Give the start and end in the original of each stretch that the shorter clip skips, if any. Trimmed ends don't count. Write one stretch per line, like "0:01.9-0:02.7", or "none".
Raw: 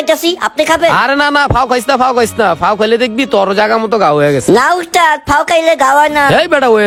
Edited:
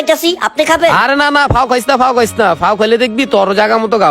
none